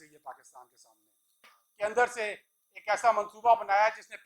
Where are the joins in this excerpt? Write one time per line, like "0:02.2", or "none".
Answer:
0:01.6